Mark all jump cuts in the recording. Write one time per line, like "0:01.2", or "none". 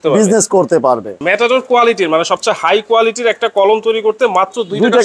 0:01.1